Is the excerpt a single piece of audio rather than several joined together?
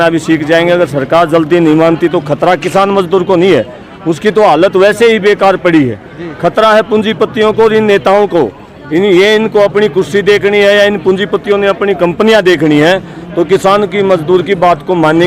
yes; 0 cuts

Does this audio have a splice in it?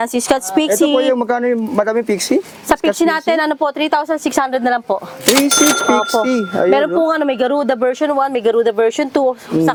no; 0 cuts

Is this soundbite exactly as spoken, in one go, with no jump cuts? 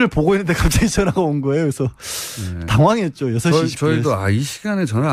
yes; 0 cuts

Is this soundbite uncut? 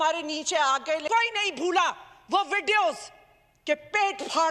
no; 1 cut; at 1.0 s

